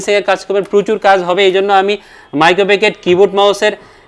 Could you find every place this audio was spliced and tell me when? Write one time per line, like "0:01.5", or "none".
none